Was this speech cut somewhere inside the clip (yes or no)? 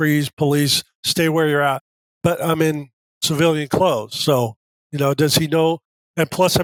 no